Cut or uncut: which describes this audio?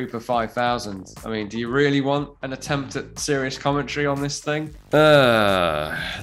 cut